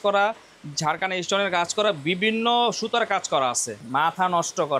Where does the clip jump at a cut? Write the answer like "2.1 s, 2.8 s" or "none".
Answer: 3.8 s